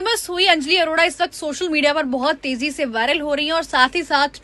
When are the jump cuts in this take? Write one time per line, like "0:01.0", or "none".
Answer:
none